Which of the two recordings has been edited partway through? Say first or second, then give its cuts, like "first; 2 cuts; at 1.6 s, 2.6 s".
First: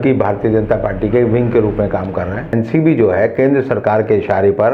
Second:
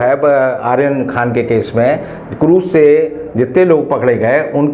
first; 1 cut; at 2.5 s